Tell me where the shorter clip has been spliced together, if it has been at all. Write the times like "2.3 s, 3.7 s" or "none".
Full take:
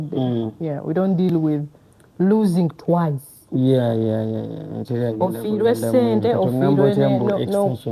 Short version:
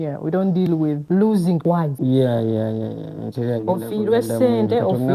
1.0 s, 1.7 s